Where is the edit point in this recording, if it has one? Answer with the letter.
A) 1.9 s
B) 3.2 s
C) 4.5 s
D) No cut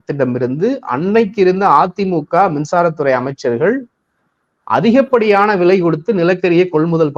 D